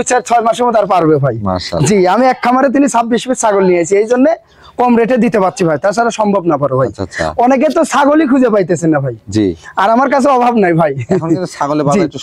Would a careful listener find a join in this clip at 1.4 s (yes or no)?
no